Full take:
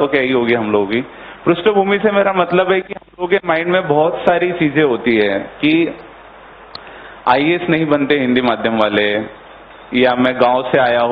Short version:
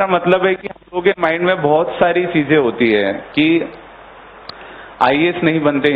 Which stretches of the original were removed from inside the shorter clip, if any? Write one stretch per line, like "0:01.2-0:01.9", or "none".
none